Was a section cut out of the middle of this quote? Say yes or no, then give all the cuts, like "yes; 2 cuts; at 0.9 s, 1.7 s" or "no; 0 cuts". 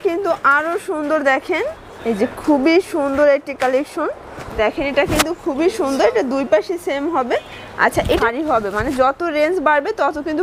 yes; 2 cuts; at 4.6 s, 8.2 s